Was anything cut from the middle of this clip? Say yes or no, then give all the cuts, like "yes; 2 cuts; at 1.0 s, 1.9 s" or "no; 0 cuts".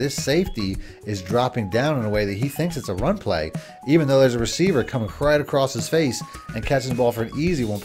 no; 0 cuts